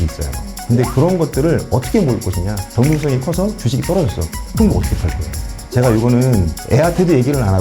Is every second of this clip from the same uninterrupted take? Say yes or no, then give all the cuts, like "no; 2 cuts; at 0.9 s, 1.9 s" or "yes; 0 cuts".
no; 2 cuts; at 2.6 s, 5.6 s